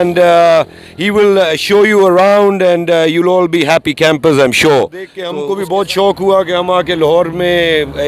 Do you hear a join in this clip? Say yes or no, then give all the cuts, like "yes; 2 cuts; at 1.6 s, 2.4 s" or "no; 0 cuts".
yes; 1 cut; at 5.2 s